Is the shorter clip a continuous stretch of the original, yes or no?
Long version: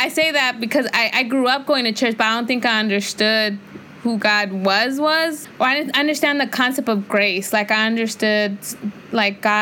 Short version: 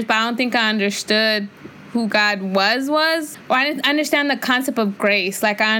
yes